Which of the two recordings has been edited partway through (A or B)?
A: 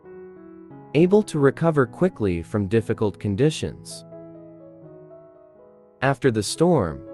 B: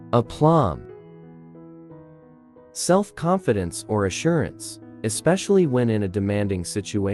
B